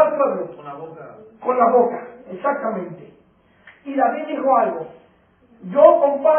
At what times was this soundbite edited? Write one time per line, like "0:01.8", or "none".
none